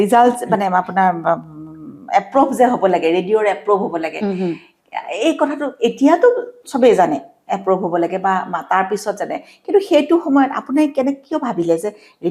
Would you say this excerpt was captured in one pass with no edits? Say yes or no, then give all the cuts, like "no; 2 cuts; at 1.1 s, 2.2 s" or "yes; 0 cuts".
yes; 0 cuts